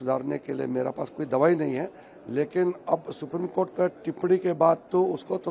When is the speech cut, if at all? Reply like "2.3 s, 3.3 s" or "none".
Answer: none

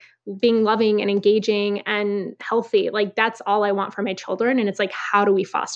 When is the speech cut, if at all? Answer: none

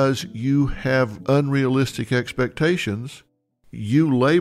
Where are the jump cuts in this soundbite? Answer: 1.2 s

